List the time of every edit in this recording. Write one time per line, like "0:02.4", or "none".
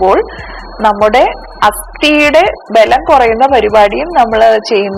none